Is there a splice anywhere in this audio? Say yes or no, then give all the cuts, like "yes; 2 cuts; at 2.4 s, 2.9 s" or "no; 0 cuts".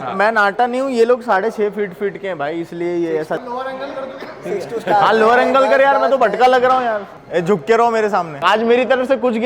yes; 3 cuts; at 3.3 s, 7.1 s, 8.4 s